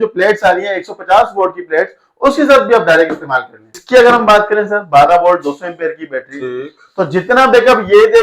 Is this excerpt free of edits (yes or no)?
no